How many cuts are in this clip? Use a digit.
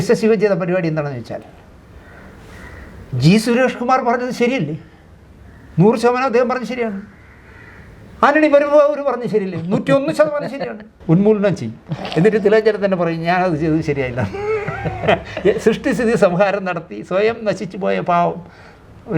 1